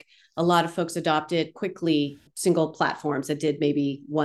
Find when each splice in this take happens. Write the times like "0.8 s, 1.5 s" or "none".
2.2 s